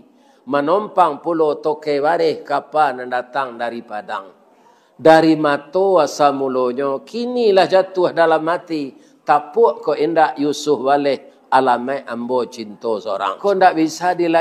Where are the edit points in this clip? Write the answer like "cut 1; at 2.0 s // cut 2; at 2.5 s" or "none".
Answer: cut 1; at 13.4 s